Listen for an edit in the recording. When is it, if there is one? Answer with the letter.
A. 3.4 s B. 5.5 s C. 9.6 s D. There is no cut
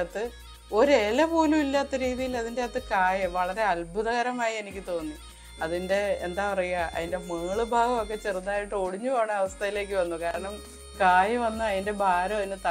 D